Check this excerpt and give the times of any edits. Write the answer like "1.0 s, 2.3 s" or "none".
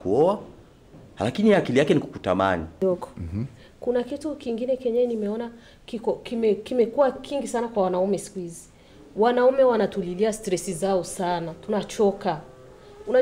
2.7 s